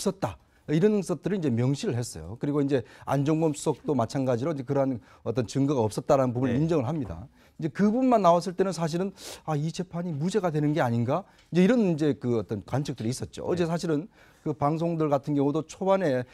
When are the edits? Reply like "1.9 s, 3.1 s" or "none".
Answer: 11.3 s